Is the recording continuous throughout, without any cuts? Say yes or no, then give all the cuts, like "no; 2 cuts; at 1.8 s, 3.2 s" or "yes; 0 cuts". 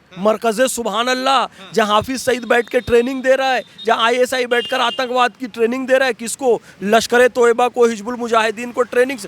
yes; 0 cuts